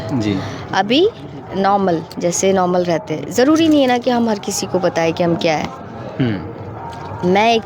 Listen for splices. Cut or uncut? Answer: uncut